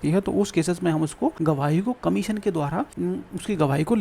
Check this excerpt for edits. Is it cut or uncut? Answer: cut